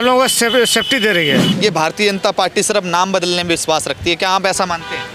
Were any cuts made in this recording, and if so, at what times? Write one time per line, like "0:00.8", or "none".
0:01.5

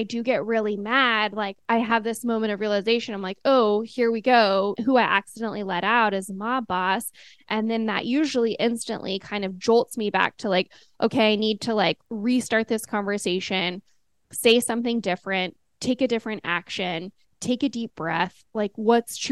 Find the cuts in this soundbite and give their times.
0:01.6
0:04.8
0:12.1

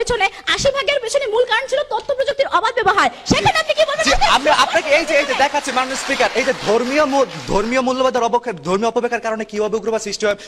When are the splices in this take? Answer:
none

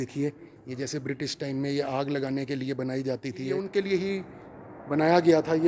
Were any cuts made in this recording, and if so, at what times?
0:03.6

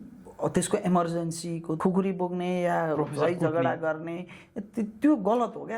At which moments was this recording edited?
0:01.7

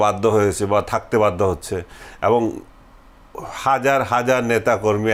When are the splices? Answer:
none

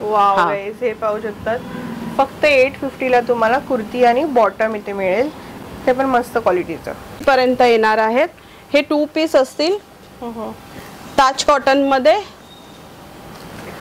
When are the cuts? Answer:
none

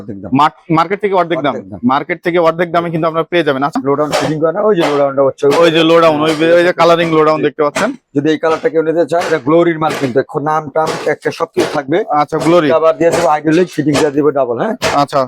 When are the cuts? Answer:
0:03.8

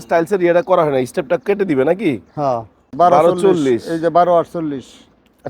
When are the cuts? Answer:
0:02.9

